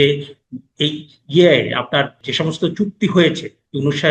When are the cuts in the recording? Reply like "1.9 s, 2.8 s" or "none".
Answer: 2.2 s